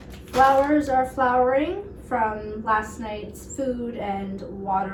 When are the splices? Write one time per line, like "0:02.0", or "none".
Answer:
none